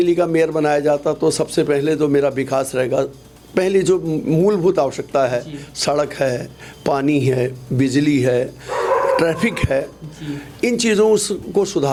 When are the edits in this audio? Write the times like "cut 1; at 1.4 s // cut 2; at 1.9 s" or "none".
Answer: none